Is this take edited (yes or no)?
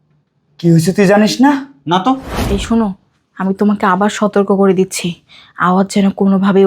yes